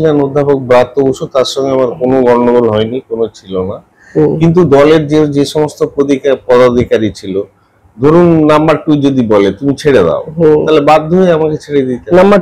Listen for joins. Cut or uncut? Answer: uncut